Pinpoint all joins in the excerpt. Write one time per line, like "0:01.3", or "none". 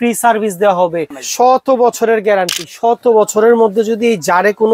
0:01.2